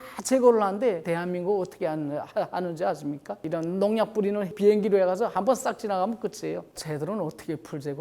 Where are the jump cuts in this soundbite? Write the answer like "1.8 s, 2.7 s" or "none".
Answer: 1.0 s, 3.4 s, 4.5 s, 6.7 s